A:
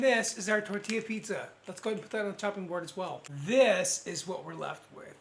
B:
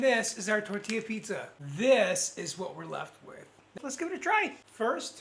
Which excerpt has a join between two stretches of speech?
B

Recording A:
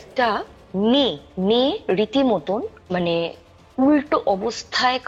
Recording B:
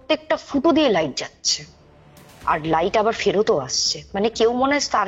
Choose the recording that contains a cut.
A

